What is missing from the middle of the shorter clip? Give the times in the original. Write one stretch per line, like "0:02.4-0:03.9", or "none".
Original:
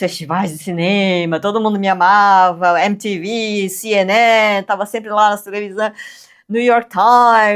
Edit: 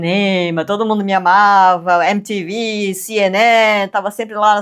none